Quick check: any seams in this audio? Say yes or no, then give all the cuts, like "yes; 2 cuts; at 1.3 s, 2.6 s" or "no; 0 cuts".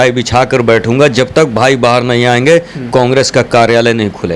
no; 0 cuts